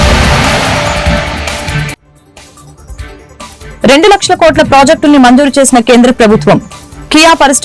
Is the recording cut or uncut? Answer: cut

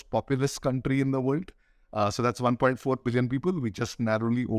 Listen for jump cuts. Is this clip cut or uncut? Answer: uncut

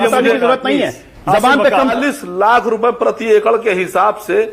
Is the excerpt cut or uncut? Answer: cut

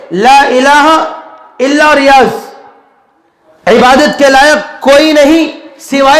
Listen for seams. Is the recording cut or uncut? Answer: uncut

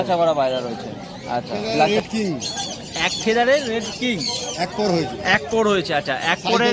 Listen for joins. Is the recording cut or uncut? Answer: cut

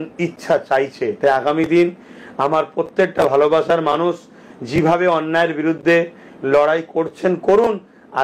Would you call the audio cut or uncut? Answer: uncut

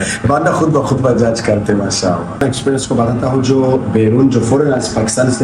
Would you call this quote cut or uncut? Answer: cut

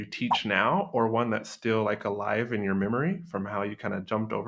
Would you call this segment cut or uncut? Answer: uncut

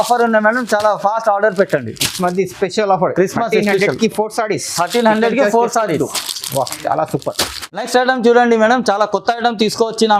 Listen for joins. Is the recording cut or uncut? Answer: uncut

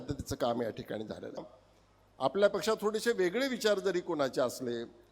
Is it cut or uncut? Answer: cut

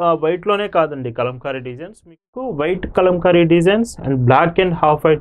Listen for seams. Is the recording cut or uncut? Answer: cut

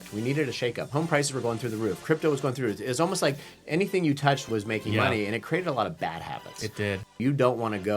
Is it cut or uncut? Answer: cut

